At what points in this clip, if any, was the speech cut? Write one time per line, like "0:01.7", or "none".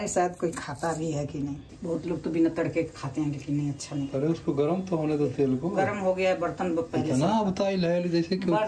0:01.7